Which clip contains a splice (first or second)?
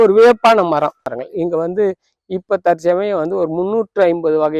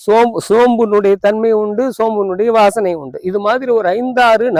first